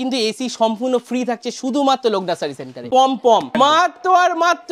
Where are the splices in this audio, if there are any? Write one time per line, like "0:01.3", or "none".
0:02.8
0:03.5